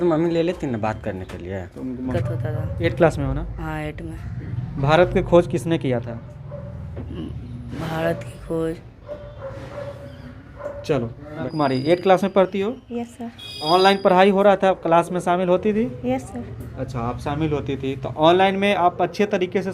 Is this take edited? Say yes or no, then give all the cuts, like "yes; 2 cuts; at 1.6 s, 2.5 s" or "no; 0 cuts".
yes; 2 cuts; at 2.1 s, 11.5 s